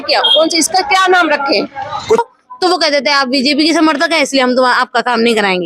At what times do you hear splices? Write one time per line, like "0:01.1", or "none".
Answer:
0:02.2